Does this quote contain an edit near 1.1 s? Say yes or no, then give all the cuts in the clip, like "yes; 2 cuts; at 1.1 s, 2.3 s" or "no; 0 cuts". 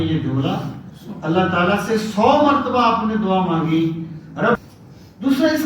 no; 1 cut; at 4.5 s